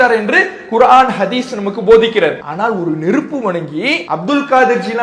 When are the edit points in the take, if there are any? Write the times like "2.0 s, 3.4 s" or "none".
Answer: 2.5 s, 4.1 s